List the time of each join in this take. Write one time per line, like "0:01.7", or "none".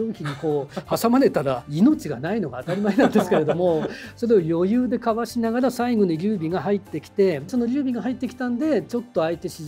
0:01.7